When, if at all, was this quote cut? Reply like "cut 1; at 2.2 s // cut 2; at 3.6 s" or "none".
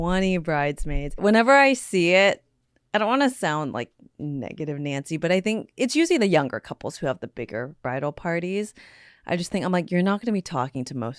cut 1; at 1.1 s